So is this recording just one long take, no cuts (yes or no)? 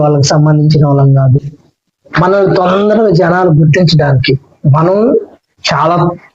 yes